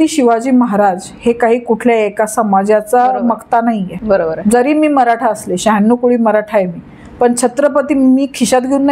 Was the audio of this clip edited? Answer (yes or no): no